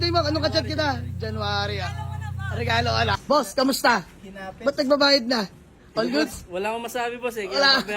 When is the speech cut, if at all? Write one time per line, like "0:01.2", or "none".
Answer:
0:03.2